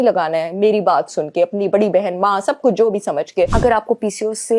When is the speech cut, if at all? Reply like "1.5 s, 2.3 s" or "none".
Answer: 3.5 s